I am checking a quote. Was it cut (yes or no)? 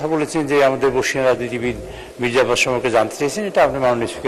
no